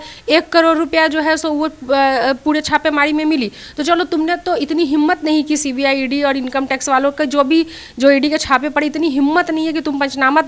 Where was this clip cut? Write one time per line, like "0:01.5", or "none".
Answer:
none